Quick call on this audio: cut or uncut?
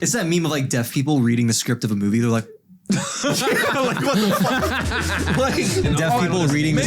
cut